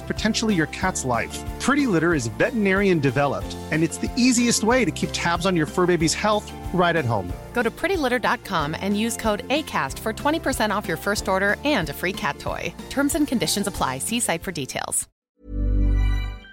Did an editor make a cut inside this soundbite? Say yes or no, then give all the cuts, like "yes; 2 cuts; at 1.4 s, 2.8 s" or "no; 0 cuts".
yes; 1 cut; at 15.3 s